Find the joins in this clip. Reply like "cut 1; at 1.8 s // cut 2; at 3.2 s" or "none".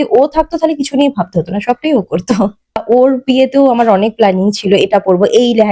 cut 1; at 2.8 s